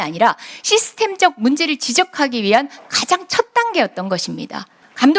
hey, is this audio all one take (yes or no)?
yes